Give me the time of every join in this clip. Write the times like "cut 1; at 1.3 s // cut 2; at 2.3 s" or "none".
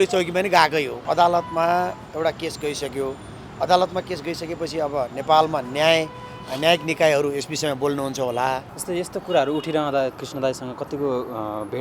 cut 1; at 1.0 s // cut 2; at 8.7 s // cut 3; at 10.1 s